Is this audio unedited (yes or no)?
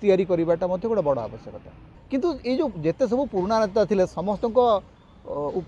no